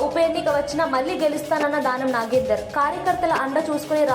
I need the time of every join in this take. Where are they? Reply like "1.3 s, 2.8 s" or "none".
none